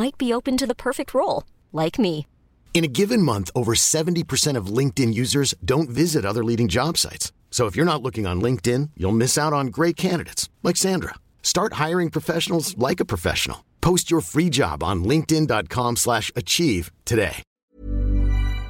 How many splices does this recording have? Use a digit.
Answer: 1